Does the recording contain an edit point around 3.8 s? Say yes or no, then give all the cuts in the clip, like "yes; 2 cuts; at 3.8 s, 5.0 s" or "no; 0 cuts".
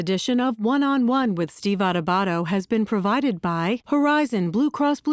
yes; 1 cut; at 3.8 s